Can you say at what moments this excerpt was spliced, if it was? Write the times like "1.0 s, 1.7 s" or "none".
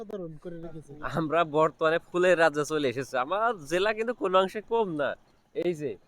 1.0 s

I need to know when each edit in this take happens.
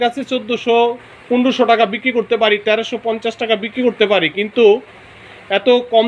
none

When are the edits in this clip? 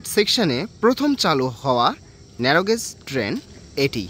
none

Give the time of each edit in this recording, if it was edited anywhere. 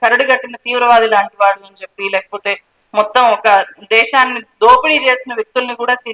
none

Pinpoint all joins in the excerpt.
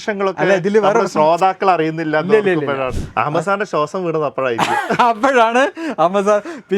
2.9 s

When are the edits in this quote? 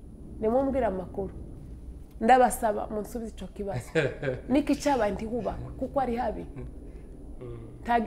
none

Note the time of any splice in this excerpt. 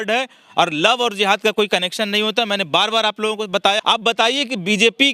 3.8 s

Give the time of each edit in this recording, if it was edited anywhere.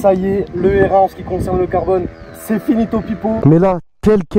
3.4 s

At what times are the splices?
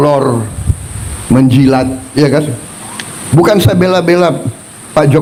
none

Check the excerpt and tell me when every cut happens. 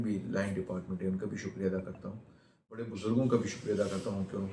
2.9 s

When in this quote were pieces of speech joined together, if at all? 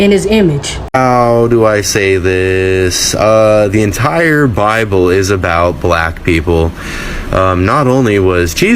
0.9 s

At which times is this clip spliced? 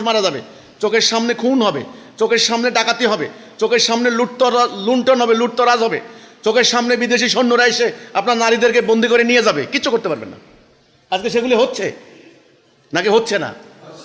none

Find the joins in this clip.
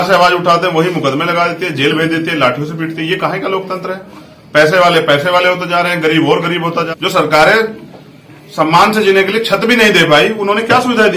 6.9 s

